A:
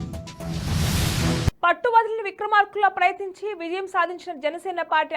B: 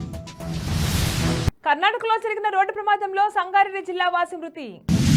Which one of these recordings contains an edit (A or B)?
A